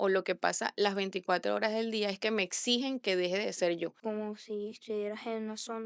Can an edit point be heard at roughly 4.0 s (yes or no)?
yes